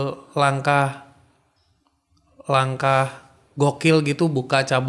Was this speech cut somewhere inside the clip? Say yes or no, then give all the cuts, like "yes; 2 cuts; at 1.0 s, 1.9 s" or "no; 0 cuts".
no; 0 cuts